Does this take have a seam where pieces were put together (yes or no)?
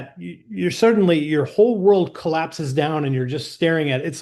no